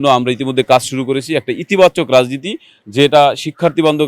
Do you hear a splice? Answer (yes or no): no